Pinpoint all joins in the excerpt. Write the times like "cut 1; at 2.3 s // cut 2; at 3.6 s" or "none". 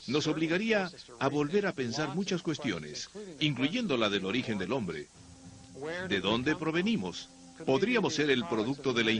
none